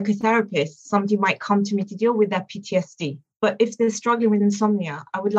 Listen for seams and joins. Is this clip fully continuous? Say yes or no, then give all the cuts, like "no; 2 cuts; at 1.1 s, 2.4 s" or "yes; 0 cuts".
yes; 0 cuts